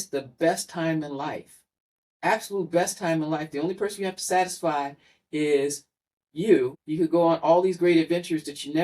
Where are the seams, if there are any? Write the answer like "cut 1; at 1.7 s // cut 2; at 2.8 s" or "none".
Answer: cut 1; at 6.8 s

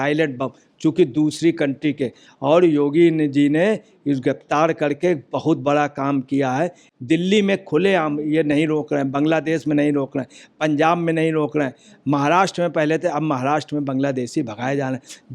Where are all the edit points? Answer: none

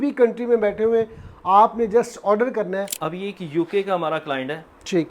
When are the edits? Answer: cut 1; at 2.9 s

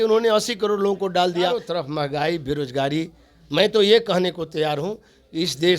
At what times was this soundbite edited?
cut 1; at 1.6 s

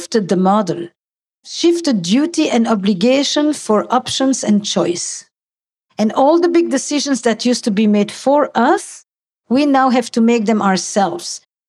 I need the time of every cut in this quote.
cut 1; at 1.5 s

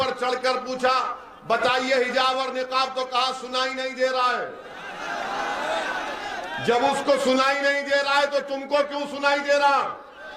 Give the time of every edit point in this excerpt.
none

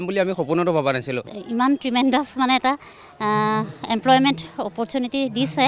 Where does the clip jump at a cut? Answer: cut 1; at 1.4 s

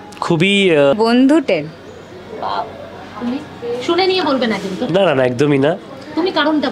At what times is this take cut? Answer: cut 1; at 0.9 s

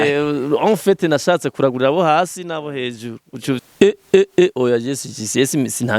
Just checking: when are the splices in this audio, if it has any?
cut 1; at 3.6 s

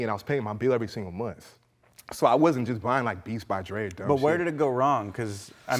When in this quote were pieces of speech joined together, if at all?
none

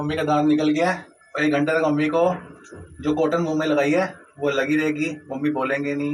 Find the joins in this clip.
none

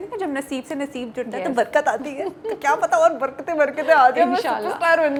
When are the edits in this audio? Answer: none

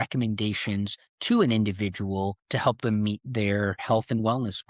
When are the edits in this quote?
cut 1; at 2.5 s // cut 2; at 3.8 s

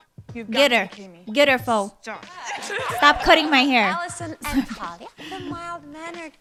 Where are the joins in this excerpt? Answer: none

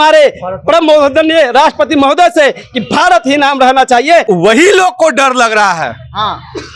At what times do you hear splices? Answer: cut 1; at 4.2 s

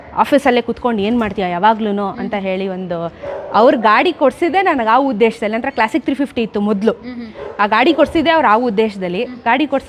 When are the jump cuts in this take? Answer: none

